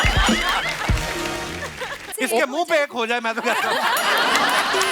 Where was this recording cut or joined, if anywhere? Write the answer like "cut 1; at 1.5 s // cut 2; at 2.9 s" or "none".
cut 1; at 2.1 s